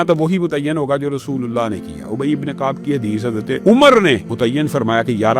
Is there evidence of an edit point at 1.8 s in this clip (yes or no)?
no